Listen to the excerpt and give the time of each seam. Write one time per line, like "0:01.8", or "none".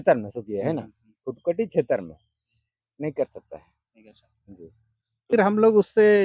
0:05.3